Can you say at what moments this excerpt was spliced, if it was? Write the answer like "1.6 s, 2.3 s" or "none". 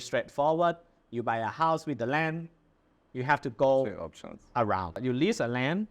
5.0 s